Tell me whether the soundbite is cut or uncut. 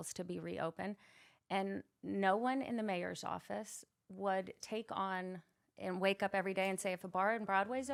uncut